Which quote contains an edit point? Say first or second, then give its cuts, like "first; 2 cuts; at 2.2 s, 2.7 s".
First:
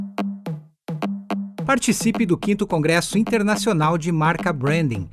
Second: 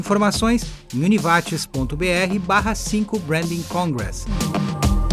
first; 1 cut; at 1.2 s